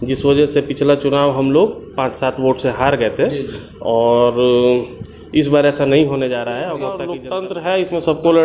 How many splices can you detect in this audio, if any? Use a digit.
1